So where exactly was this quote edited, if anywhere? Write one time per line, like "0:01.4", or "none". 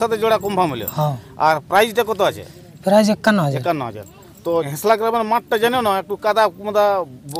0:04.7